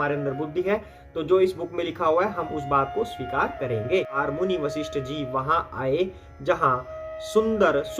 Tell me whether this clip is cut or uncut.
cut